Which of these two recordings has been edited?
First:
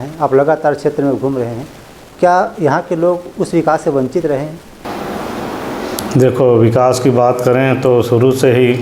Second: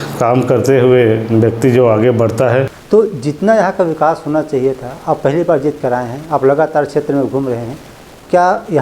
second; 1 cut; at 2.8 s

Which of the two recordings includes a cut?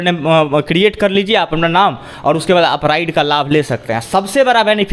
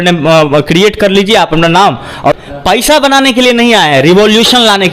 second; 1 cut; at 2.4 s

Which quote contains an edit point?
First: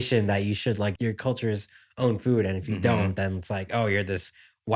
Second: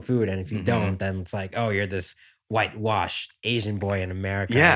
first; 1 cut; at 0.9 s

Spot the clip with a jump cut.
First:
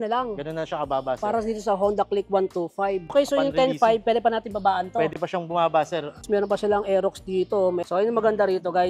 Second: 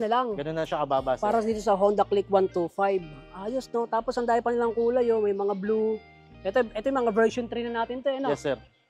first; 3 cuts; at 3.1 s, 6.2 s, 7.8 s

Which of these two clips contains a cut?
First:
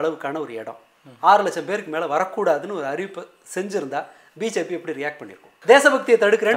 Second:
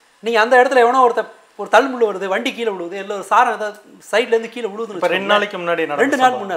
first; 1 cut; at 5.5 s

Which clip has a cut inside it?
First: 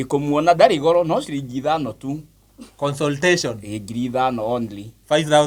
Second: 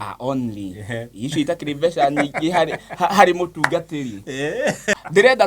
second; 1 cut; at 4.4 s

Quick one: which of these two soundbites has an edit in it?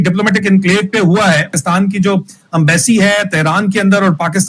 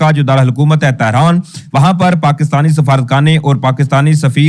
first; 1 cut; at 1.5 s

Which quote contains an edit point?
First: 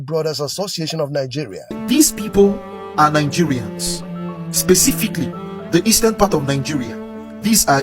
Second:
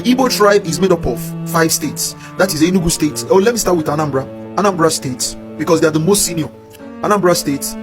first; 1 cut; at 1.7 s

